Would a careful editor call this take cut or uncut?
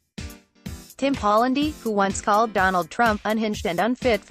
cut